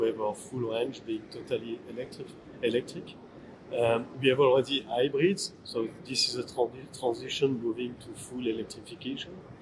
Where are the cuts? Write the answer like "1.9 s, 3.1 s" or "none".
none

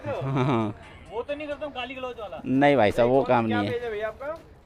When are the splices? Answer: none

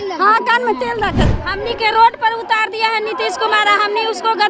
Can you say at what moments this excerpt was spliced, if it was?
1.4 s

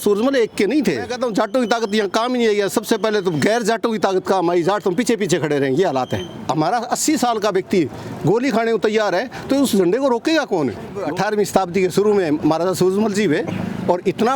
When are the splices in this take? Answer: 1.1 s, 6.3 s, 11.0 s

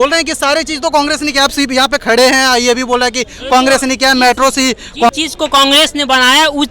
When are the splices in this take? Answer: 5.1 s

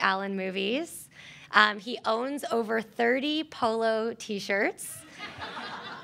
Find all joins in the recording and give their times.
1.3 s

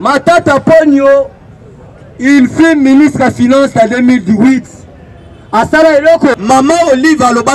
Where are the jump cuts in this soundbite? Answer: 6.3 s

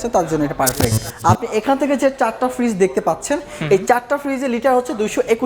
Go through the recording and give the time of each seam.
1.0 s

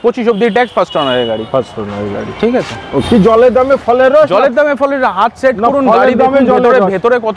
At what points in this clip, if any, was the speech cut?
none

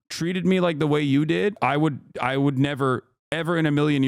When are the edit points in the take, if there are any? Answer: 1.6 s

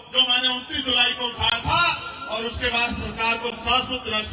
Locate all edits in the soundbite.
none

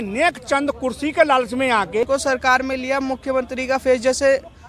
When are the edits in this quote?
2.0 s

